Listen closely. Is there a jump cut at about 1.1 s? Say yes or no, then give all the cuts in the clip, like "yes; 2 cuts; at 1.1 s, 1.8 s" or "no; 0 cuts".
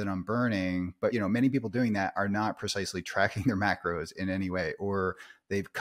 yes; 1 cut; at 1.1 s